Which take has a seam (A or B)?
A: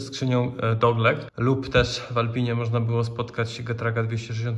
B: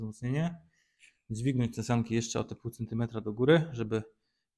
A